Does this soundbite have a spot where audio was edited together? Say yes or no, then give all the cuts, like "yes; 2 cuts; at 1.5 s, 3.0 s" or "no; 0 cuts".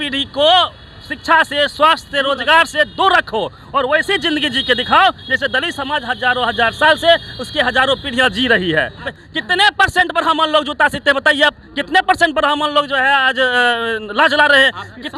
yes; 1 cut; at 9.0 s